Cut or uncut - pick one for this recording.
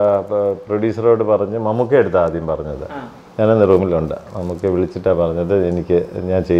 uncut